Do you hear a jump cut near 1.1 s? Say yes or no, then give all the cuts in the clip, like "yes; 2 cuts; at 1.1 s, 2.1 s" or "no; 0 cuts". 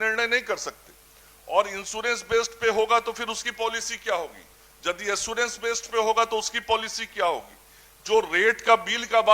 no; 0 cuts